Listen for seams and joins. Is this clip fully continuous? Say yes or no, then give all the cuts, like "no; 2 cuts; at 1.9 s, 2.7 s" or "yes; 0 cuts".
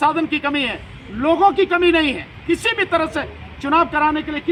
yes; 0 cuts